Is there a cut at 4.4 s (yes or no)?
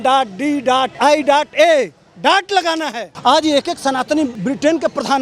yes